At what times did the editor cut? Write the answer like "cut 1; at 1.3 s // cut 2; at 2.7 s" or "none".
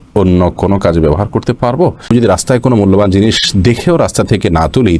cut 1; at 2.1 s